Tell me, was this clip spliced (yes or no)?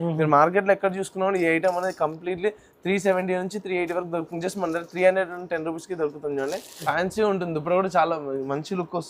yes